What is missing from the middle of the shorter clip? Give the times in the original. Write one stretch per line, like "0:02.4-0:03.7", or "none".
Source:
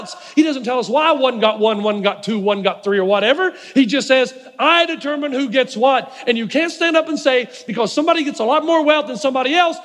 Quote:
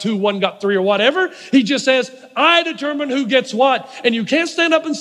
none